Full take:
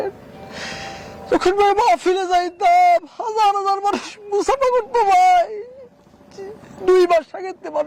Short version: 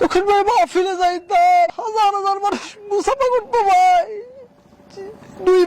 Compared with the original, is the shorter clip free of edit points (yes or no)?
no